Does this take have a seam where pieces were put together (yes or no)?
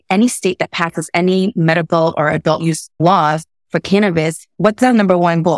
yes